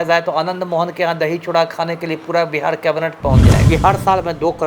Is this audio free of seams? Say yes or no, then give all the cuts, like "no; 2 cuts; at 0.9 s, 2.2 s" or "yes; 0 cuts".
no; 1 cut; at 3.6 s